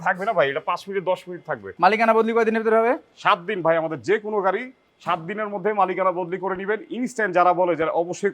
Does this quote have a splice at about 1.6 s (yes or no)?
yes